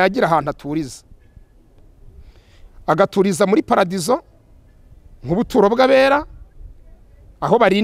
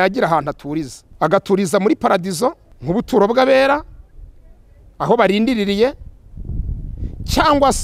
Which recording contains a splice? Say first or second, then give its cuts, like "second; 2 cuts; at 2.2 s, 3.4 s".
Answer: second; 2 cuts; at 1.0 s, 2.7 s